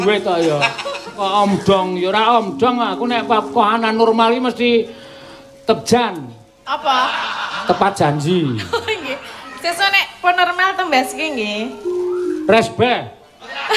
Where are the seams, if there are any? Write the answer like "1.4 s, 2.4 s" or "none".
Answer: none